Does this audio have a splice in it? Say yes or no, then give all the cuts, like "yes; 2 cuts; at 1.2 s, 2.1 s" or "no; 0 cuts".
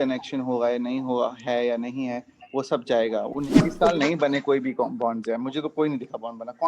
yes; 1 cut; at 3.4 s